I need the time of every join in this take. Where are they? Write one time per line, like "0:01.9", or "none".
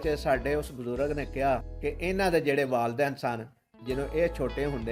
0:01.7